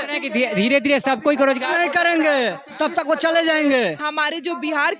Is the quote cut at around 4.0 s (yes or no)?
yes